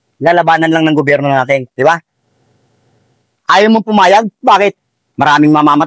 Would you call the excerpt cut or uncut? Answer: uncut